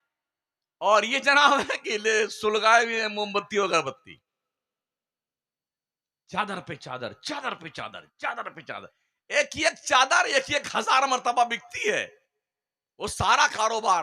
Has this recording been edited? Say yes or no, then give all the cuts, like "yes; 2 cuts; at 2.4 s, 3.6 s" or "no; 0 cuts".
no; 0 cuts